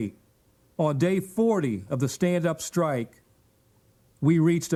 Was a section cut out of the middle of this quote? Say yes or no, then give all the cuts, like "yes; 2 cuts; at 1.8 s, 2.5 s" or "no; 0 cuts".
no; 0 cuts